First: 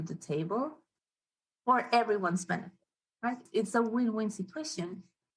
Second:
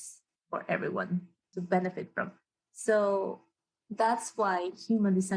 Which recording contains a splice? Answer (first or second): first